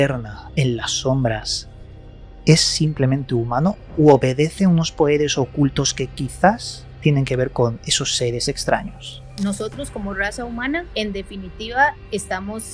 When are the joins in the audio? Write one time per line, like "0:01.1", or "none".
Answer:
0:09.3
0:10.9